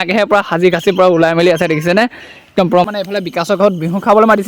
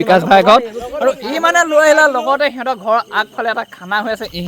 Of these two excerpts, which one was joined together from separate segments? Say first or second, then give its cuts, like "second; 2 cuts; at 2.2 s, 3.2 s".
first; 1 cut; at 2.9 s